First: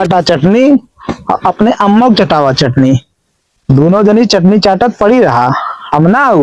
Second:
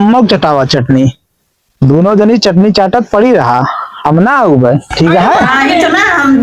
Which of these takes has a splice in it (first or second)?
second